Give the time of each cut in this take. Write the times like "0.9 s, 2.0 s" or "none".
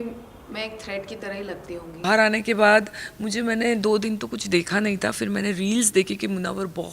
1.9 s